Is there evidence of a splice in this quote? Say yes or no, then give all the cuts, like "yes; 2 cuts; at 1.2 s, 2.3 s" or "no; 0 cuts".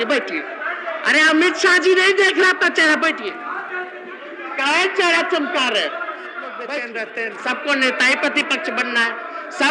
yes; 1 cut; at 6.7 s